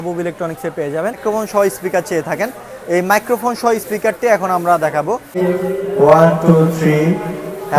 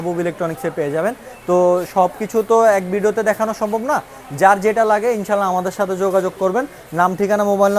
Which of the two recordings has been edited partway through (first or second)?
first